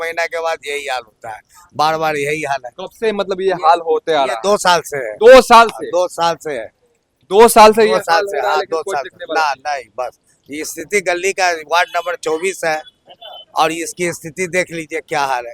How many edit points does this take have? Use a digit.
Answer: 0